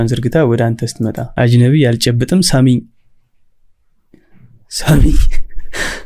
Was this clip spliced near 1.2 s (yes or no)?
yes